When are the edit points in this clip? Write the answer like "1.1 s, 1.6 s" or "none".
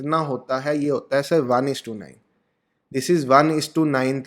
none